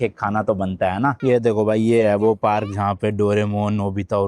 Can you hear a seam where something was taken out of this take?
yes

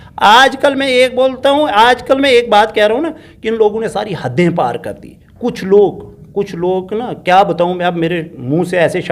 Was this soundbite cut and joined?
no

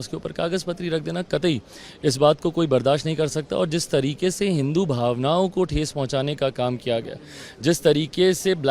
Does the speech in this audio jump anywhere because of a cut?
no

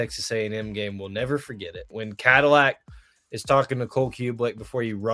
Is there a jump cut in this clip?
yes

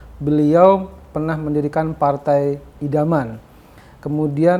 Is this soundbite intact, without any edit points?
yes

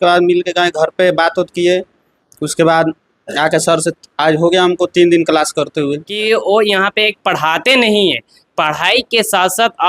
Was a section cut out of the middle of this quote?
yes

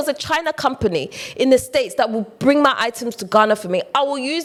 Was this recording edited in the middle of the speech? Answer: no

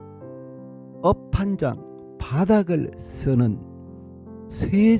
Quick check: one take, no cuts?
no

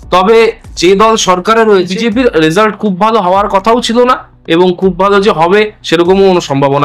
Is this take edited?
yes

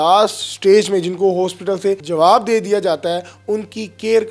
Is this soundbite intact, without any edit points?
no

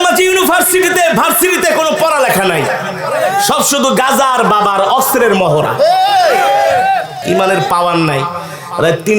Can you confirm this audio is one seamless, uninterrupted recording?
no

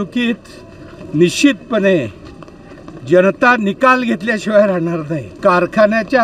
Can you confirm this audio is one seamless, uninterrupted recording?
no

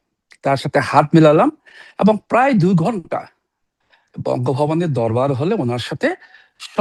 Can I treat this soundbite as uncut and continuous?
yes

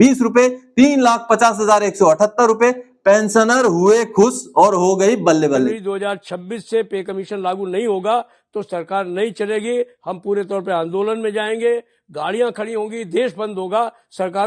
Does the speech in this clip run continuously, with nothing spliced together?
no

